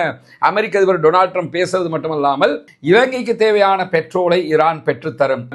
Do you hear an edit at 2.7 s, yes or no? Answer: yes